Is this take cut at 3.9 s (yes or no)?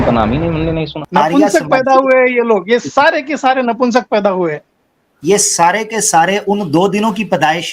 no